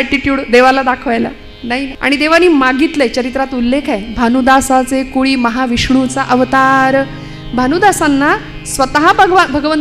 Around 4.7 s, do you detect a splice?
no; 1 cut; at 1.9 s

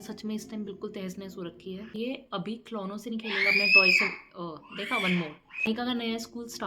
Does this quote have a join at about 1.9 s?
yes; 2 cuts; at 1.9 s, 5.7 s

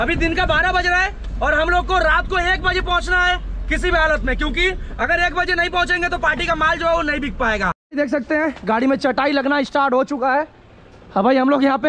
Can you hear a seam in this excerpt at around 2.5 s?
no; 1 cut; at 7.8 s

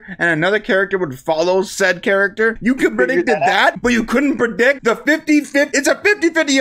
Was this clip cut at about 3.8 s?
yes; 4 cuts; at 2.6 s, 3.8 s, 4.8 s, 5.7 s

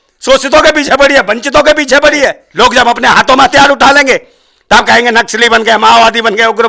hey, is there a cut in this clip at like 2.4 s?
yes; 1 cut; at 2.4 s

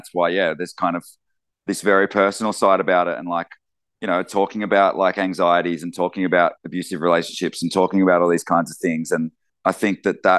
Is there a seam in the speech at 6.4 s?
no; 1 cut; at 9.4 s

